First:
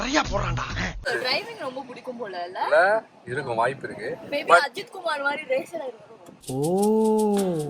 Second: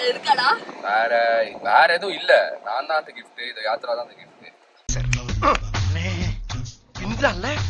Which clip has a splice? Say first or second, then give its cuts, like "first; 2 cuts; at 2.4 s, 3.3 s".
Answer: first; 1 cut; at 1.1 s